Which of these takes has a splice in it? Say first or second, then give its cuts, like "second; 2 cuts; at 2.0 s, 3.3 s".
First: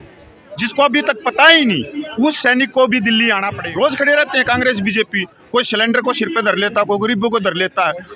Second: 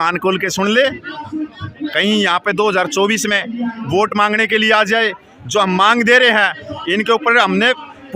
first; 1 cut; at 3.6 s